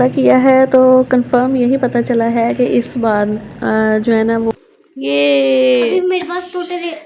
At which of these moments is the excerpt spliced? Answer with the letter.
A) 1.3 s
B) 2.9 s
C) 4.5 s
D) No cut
C